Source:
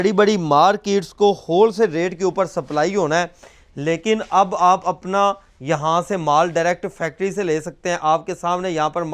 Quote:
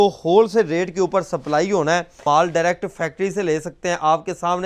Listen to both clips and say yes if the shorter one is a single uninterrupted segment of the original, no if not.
no